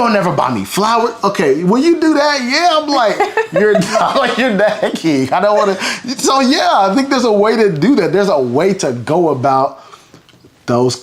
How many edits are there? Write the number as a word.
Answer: zero